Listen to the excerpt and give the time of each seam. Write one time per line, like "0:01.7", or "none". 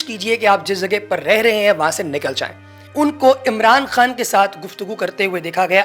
0:02.8